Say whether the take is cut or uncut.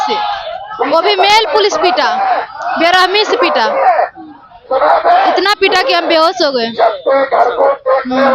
uncut